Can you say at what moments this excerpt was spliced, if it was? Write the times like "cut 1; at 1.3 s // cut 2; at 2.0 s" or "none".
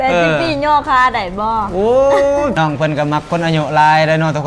cut 1; at 2.5 s